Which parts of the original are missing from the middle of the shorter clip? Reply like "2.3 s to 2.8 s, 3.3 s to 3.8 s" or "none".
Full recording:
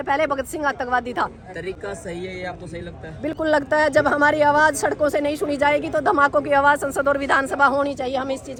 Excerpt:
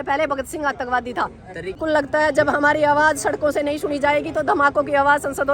1.8 s to 3.4 s